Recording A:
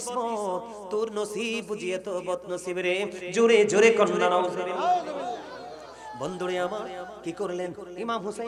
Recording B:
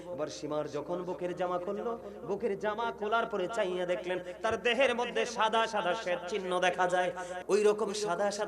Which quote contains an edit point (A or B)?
B